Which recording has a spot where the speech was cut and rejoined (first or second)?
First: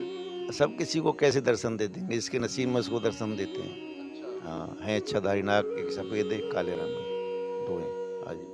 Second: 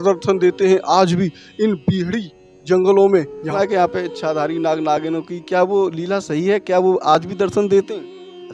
second